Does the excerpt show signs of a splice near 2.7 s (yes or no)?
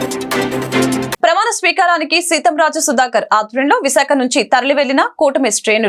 no